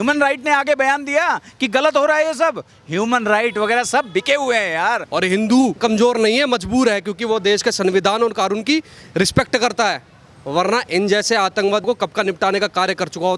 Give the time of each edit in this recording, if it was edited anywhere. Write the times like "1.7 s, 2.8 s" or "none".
5.0 s, 5.8 s

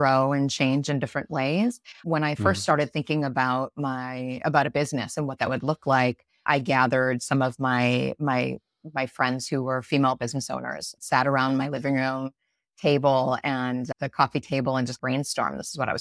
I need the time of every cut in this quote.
none

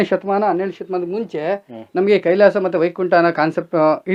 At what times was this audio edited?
none

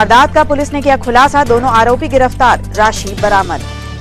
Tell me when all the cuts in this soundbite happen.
none

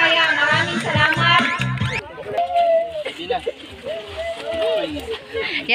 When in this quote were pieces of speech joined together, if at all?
1.8 s

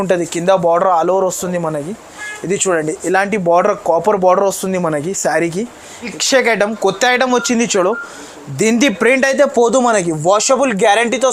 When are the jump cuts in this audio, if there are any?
6.1 s

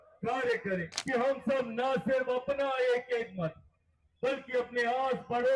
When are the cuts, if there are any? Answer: 0.9 s

